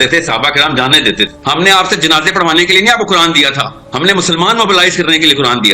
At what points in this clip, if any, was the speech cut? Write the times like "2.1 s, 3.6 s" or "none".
1.4 s